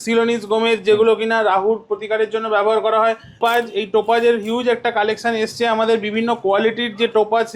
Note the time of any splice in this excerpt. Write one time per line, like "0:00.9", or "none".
0:03.4